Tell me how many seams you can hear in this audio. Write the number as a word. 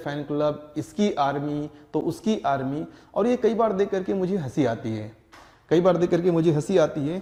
zero